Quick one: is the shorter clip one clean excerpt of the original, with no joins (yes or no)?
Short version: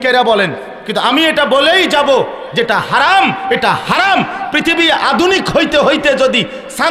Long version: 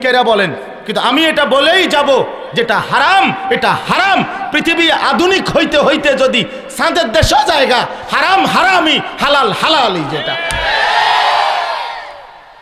yes